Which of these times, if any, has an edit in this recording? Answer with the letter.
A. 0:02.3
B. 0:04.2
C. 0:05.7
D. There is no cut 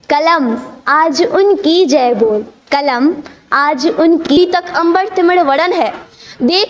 B